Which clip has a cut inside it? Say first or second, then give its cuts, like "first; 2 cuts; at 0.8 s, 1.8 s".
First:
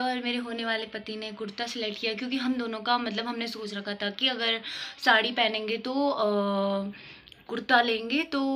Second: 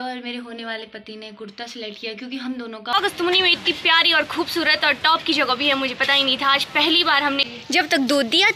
second; 2 cuts; at 2.9 s, 7.5 s